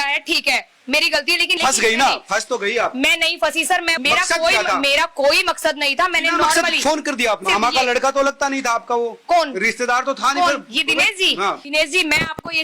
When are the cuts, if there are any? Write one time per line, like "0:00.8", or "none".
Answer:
0:01.6
0:03.9
0:07.4
0:11.6